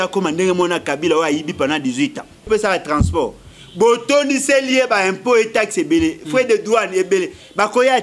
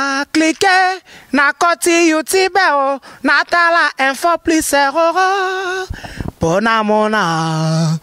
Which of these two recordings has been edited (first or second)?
first